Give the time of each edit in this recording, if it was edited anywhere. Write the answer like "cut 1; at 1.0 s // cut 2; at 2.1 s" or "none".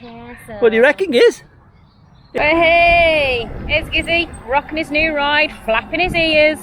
cut 1; at 2.2 s